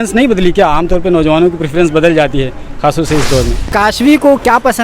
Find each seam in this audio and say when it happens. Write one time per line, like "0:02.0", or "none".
0:03.7